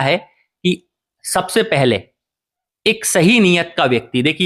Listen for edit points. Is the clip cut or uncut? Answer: uncut